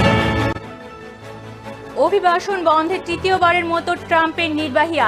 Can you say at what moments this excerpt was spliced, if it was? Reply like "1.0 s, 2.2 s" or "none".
none